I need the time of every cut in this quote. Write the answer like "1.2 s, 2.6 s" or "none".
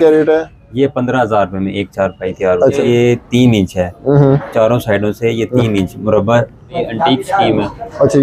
2.8 s, 6.8 s

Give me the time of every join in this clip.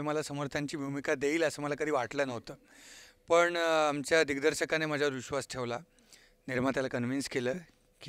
none

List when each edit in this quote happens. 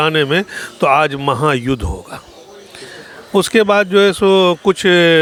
none

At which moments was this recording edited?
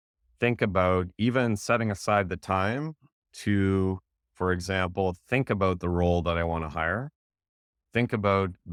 none

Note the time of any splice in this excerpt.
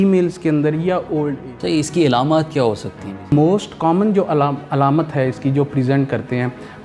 1.4 s, 3.3 s

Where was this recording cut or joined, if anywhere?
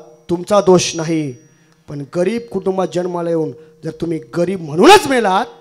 none

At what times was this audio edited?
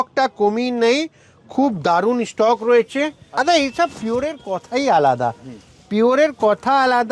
3.4 s

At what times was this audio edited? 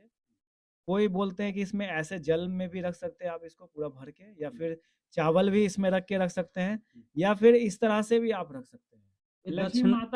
none

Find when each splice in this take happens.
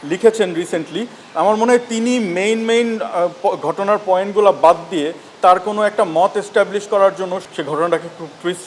7.4 s

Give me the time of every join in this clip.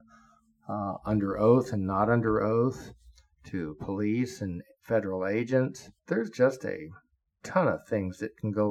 5.9 s

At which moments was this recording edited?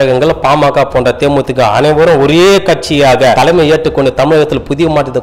3.4 s

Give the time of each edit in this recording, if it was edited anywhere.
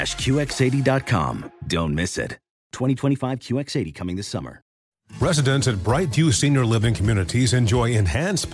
4.8 s

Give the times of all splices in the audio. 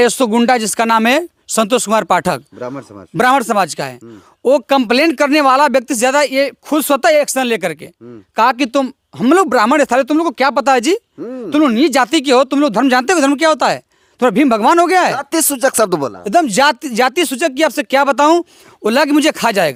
none

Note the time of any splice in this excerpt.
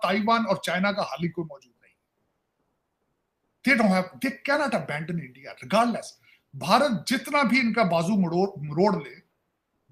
none

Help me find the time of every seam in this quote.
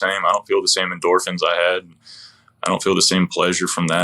none

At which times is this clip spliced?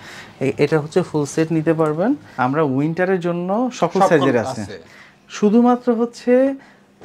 2.3 s

